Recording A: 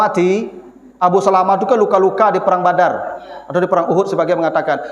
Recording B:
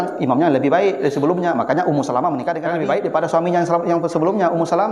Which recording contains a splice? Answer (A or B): B